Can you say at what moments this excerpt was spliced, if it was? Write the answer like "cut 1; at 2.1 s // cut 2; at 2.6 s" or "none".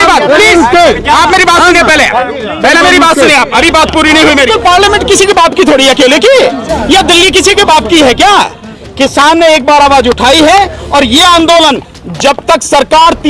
cut 1; at 4.5 s // cut 2; at 8.8 s